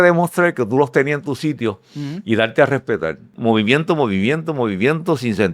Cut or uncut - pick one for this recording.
cut